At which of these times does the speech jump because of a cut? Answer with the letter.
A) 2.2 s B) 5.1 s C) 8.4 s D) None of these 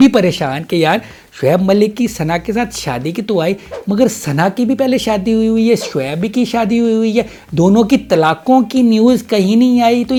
D